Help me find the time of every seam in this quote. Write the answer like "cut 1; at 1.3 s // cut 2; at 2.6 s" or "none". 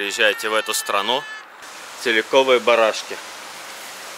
cut 1; at 1.6 s